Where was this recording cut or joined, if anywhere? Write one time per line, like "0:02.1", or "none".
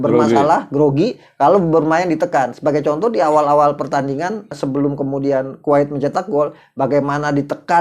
0:04.5